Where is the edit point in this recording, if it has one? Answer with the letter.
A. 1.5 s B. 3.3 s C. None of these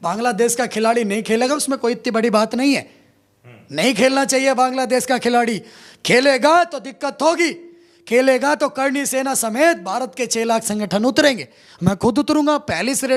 C